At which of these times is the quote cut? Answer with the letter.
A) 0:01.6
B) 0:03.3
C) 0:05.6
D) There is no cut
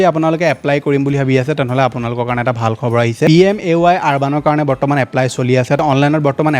D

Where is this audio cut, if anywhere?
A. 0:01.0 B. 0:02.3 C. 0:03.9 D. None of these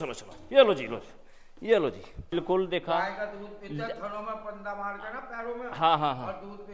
B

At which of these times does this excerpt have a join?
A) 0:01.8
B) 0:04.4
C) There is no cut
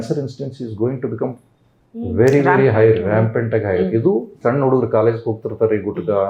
B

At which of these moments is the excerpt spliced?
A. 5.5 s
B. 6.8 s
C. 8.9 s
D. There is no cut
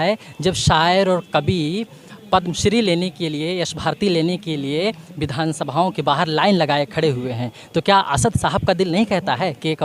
D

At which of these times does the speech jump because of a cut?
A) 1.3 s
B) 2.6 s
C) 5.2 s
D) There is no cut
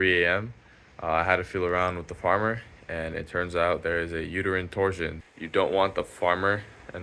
C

